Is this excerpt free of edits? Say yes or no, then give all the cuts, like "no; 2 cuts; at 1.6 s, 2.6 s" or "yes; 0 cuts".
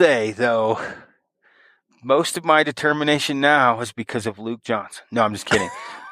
yes; 0 cuts